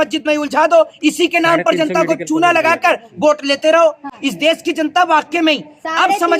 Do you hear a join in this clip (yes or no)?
no